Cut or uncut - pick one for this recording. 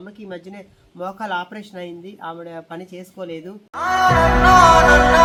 uncut